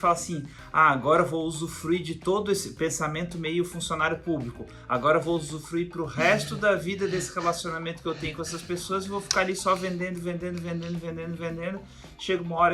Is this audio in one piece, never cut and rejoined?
yes; 0 cuts

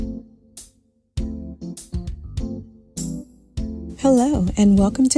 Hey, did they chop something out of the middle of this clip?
no; 0 cuts

